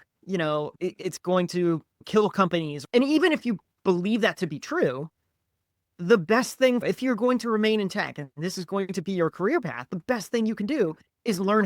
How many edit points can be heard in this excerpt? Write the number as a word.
two